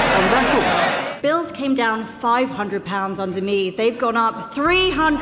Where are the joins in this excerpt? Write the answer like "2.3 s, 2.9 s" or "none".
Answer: 1.0 s